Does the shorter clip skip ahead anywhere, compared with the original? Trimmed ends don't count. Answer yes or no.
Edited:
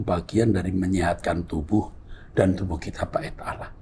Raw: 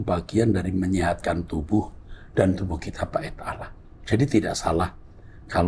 no